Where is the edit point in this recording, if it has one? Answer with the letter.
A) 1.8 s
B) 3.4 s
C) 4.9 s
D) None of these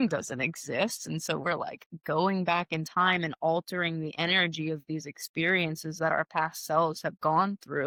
D